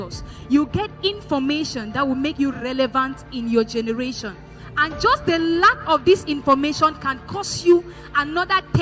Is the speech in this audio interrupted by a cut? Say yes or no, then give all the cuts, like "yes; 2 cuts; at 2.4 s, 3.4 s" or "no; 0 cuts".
no; 0 cuts